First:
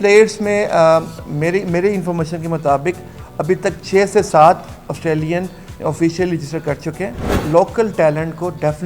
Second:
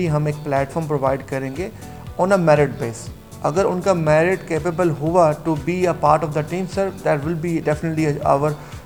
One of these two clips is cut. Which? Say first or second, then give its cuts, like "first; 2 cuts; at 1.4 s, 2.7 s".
first; 1 cut; at 7.3 s